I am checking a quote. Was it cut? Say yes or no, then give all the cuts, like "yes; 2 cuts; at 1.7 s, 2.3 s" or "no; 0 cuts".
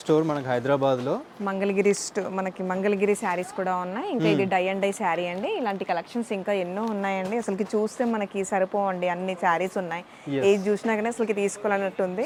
no; 0 cuts